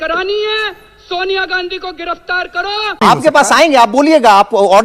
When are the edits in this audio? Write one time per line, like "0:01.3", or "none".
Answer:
0:03.0